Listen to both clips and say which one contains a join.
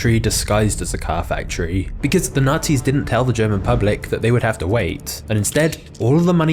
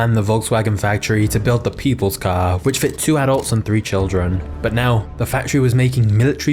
first; 1 cut; at 5.5 s

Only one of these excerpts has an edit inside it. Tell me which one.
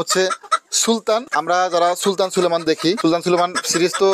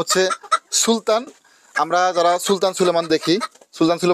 first; 2 cuts; at 1.3 s, 3.0 s

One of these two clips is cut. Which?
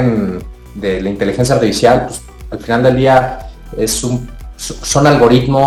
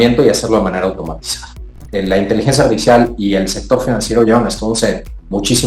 second; 1 cut; at 1.8 s

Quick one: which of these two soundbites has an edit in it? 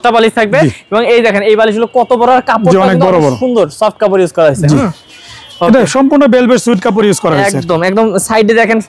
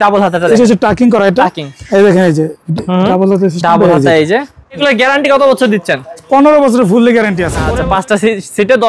second; 2 cuts; at 4.8 s, 7.6 s

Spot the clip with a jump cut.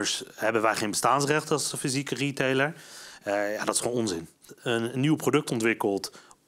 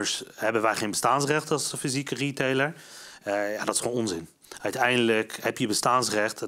first; 1 cut; at 4.5 s

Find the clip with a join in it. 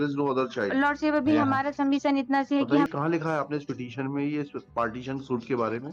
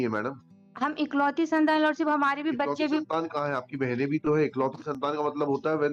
first; 1 cut; at 2.9 s

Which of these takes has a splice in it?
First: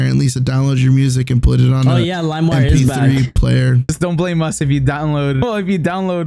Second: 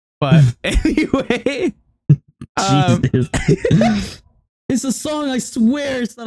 first; 2 cuts; at 3.9 s, 5.4 s

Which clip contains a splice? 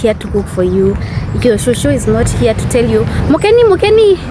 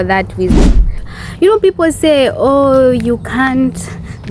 second; 1 cut; at 0.9 s

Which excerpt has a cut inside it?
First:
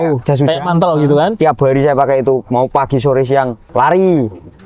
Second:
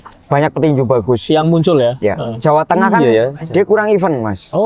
first; 1 cut; at 3.6 s

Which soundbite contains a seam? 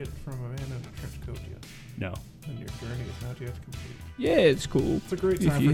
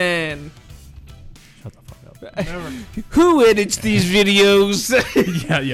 first; 1 cut; at 4.1 s

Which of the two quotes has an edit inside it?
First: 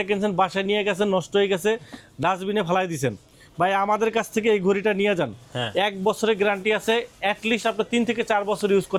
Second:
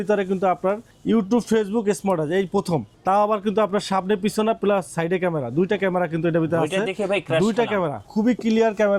second; 3 cuts; at 0.9 s, 2.9 s, 8.0 s

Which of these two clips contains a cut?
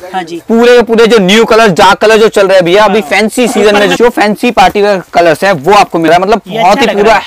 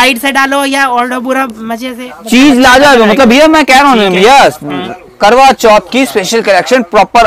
first; 2 cuts; at 3.9 s, 6.1 s

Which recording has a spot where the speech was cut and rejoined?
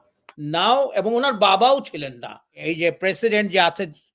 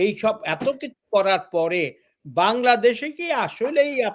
first; 1 cut; at 2.6 s

